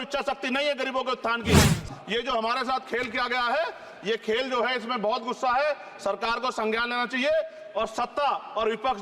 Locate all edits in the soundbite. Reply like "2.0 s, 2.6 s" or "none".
1.8 s